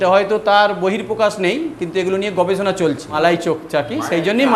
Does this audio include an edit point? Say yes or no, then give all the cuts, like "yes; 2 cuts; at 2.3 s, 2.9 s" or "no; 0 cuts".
yes; 1 cut; at 3.1 s